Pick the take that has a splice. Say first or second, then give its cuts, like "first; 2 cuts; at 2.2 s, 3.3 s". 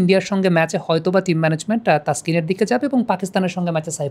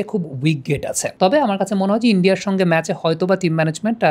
second; 1 cut; at 1.0 s